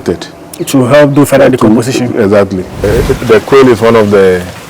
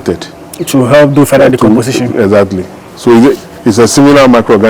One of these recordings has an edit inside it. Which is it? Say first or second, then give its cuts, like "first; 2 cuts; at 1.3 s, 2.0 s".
first; 1 cut; at 2.9 s